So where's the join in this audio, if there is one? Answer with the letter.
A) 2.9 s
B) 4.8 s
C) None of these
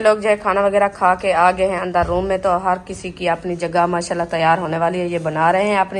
C